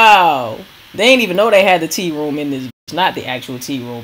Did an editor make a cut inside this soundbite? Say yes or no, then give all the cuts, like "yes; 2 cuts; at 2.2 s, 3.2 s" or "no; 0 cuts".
no; 0 cuts